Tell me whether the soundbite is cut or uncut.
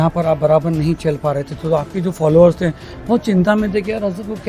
uncut